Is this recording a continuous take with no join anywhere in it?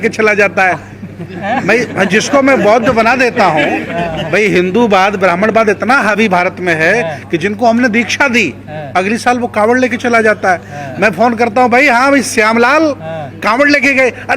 yes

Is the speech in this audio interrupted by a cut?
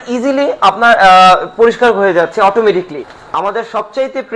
yes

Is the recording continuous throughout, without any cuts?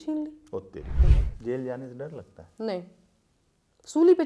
no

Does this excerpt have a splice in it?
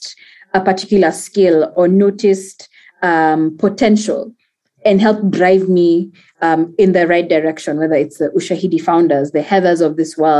no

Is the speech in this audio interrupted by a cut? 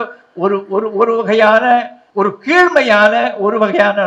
yes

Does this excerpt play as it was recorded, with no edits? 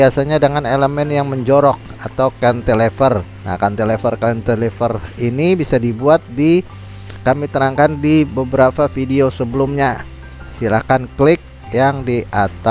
yes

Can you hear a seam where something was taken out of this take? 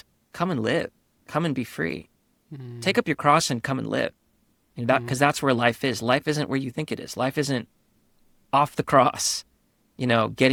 no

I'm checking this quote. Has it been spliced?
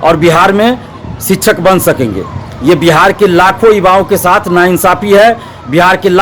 no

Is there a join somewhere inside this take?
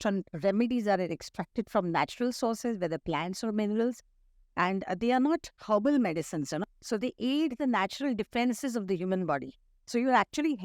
yes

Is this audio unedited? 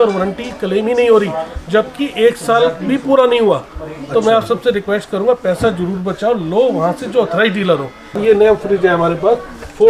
no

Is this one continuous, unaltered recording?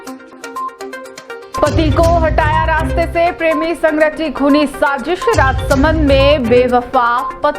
no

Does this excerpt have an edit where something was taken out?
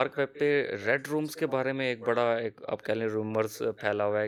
no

